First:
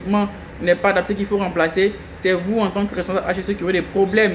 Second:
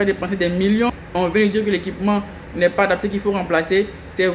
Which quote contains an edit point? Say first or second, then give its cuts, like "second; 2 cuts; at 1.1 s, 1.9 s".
second; 1 cut; at 1.0 s